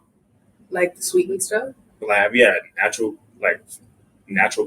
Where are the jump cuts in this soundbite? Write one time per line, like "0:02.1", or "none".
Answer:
0:01.9